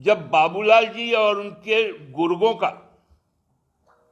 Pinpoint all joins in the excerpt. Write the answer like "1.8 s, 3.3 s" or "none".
none